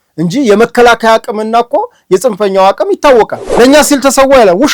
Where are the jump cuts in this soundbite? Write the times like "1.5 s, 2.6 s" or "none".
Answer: 3.4 s